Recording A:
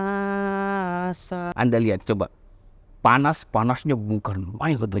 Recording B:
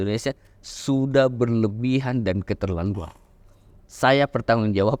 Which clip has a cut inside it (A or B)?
A